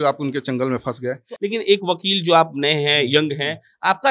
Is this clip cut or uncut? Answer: cut